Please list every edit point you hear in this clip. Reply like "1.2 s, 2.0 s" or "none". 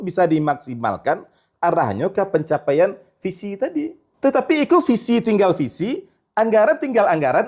4.0 s